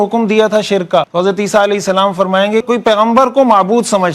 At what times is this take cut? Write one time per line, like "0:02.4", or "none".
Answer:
0:01.1
0:02.6